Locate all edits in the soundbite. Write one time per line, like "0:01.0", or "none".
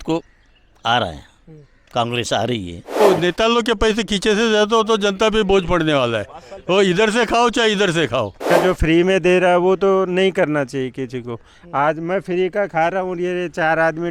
0:03.0
0:08.5